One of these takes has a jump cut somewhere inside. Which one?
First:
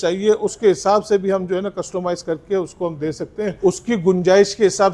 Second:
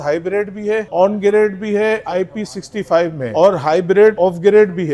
second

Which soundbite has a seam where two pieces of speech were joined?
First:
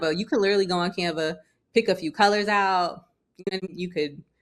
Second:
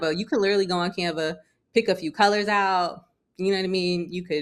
first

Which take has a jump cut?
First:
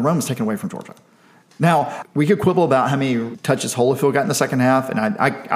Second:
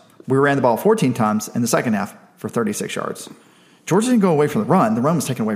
first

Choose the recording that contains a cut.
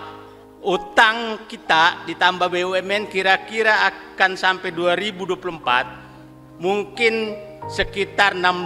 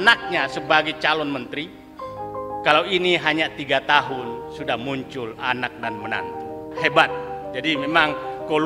second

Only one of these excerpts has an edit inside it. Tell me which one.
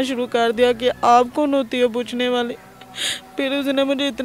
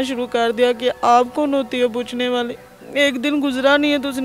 second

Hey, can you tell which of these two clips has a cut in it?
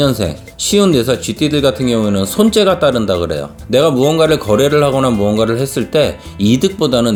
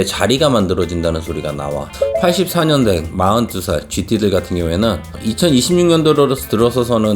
second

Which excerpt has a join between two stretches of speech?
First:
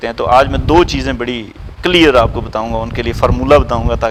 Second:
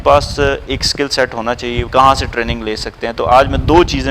second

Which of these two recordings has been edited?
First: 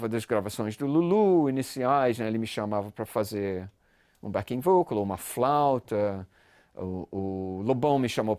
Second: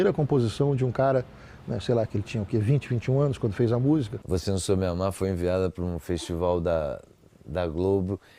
second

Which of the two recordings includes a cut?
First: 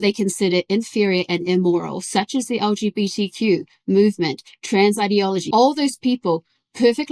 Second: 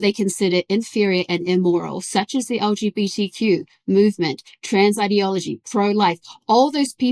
first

